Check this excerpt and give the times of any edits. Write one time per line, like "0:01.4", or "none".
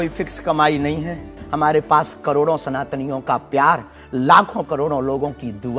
0:01.4